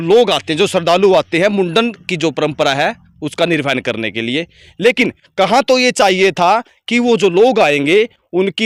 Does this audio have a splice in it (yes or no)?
no